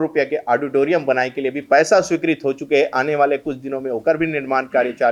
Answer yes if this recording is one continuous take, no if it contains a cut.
yes